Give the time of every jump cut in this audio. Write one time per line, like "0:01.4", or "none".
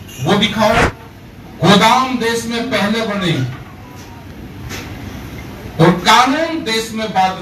0:01.0